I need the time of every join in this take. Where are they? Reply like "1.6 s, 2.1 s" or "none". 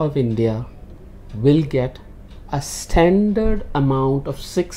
none